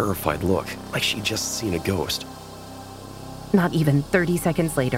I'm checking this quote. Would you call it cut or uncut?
cut